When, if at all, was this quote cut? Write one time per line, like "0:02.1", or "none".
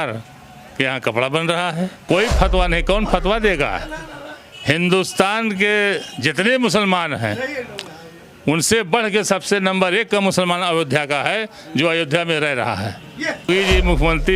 0:02.0
0:13.5